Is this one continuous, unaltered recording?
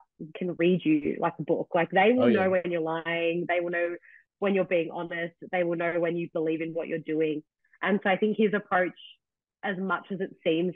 yes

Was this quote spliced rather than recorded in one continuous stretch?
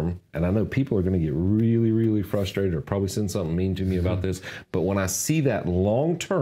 no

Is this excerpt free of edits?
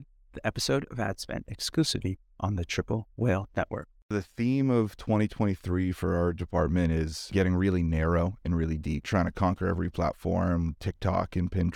no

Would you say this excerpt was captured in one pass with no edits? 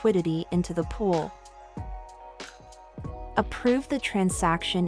no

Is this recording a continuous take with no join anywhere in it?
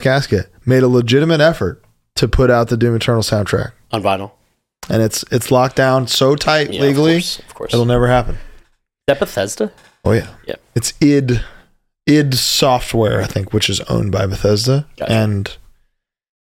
yes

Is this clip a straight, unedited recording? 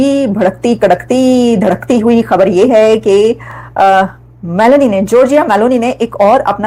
yes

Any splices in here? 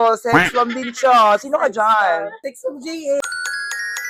no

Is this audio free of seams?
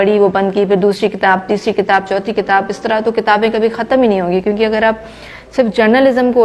yes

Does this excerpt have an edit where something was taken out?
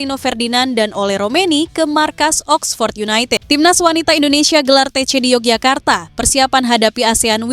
yes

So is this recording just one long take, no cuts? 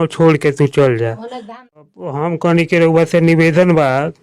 no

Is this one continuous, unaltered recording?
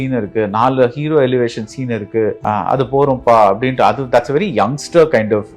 no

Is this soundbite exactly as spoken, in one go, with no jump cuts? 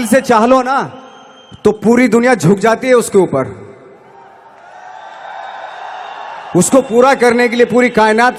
yes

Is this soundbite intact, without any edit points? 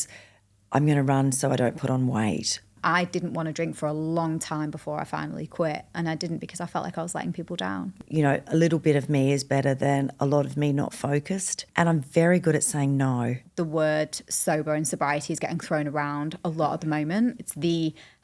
no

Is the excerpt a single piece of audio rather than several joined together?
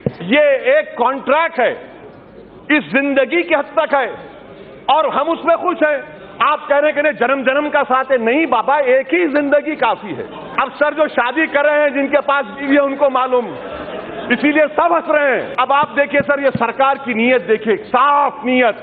no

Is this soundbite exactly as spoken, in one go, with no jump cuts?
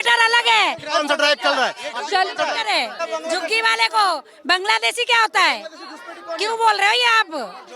no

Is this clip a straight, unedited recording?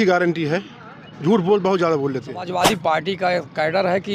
no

